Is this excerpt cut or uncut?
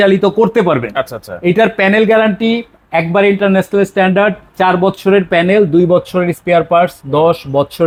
uncut